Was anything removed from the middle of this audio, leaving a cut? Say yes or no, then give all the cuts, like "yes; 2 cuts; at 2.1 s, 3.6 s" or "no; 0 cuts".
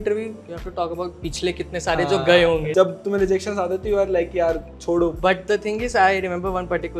yes; 2 cuts; at 2.7 s, 5.2 s